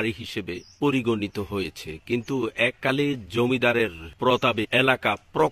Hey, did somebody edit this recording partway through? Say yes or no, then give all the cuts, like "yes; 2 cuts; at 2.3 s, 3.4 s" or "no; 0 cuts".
yes; 1 cut; at 4.0 s